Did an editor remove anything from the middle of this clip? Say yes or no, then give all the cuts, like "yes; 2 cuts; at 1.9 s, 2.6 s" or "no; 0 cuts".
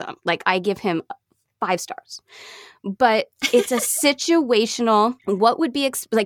yes; 1 cut; at 5.2 s